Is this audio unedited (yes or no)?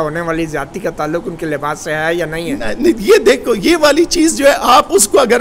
yes